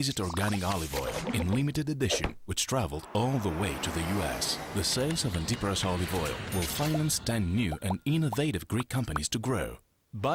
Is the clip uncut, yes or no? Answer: yes